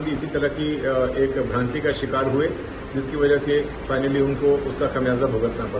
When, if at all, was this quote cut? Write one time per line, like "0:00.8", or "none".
none

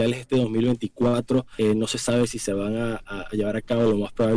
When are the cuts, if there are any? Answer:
0:01.5

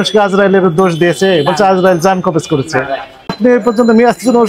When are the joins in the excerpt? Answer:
0:03.3

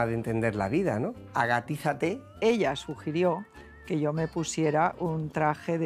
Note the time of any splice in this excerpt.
0:01.2
0:02.4

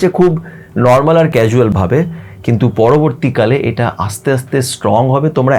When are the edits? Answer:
0:01.4

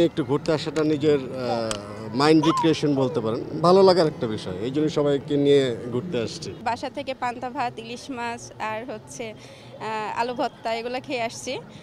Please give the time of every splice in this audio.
none

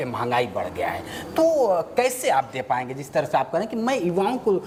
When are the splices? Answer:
none

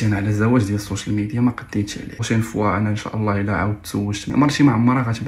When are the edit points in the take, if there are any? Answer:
0:02.2
0:04.2

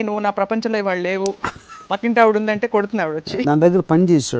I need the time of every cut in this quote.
0:03.4

